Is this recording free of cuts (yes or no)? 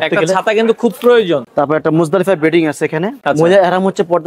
no